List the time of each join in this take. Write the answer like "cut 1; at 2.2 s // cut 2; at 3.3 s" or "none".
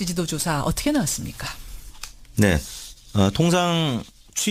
none